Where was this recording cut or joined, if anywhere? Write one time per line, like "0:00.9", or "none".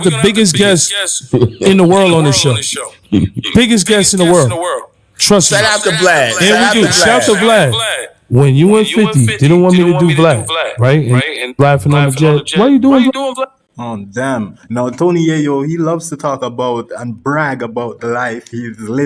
none

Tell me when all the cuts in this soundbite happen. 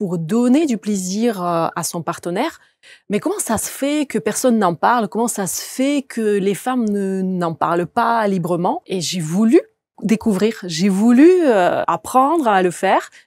0:08.8
0:09.9
0:11.9

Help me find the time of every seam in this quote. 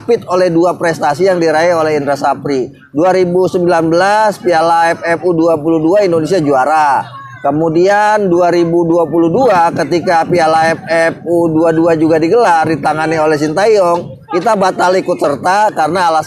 none

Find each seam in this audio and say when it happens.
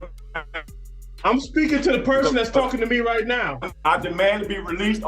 0:03.6

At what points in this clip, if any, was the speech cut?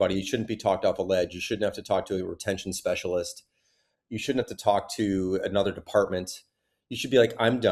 none

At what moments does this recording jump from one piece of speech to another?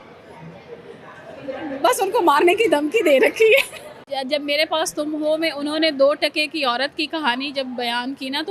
0:04.1

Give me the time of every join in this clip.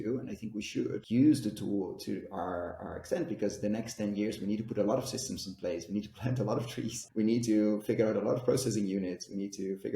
0:01.0
0:07.0

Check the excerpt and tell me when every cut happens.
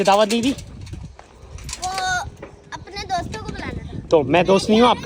none

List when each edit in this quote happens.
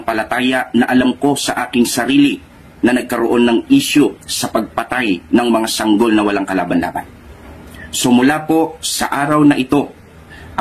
none

